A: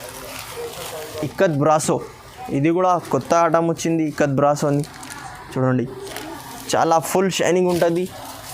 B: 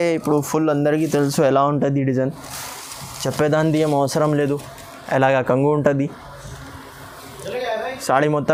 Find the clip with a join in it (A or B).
A